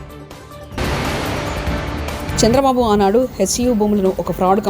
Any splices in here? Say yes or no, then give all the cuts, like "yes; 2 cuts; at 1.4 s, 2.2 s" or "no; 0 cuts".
yes; 2 cuts; at 0.7 s, 2.3 s